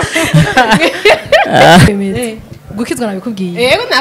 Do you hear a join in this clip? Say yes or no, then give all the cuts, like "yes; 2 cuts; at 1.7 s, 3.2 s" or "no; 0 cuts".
yes; 1 cut; at 1.9 s